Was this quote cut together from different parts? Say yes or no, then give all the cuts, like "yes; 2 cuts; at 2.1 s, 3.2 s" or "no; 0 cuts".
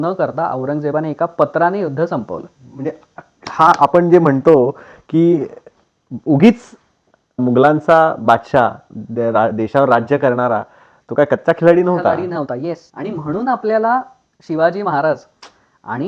no; 0 cuts